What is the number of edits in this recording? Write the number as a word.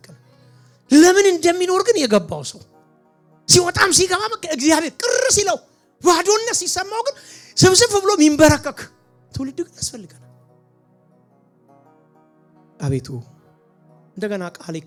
zero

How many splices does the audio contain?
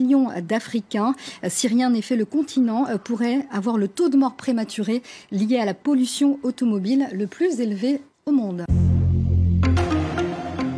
one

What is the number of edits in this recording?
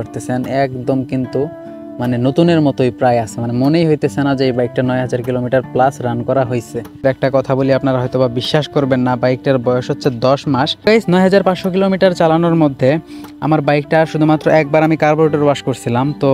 two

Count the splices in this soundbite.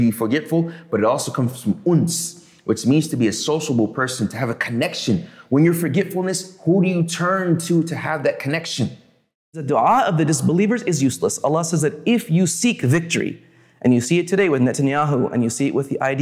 one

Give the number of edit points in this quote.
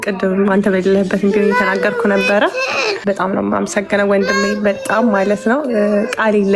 one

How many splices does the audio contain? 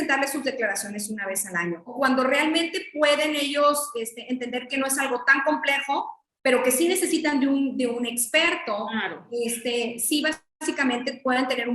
one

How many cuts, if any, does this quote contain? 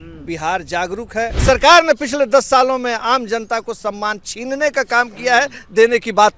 one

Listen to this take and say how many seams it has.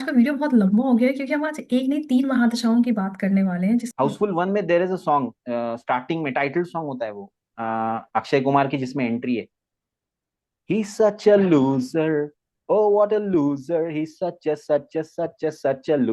one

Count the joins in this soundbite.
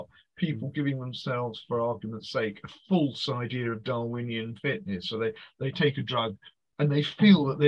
zero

